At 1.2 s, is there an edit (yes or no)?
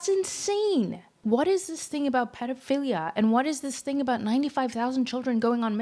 yes